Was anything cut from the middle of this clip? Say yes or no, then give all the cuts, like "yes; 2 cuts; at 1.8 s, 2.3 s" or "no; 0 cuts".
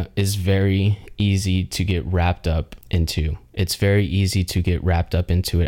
yes; 1 cut; at 2.8 s